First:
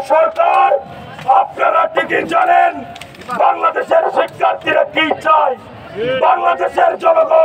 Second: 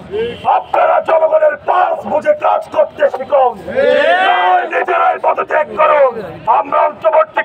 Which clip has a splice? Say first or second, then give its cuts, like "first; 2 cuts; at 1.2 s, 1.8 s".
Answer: second; 1 cut; at 6.4 s